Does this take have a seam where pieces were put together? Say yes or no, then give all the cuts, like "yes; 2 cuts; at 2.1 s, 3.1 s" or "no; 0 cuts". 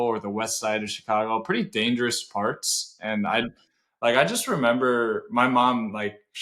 no; 0 cuts